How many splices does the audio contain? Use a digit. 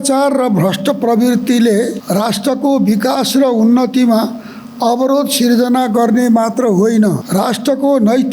2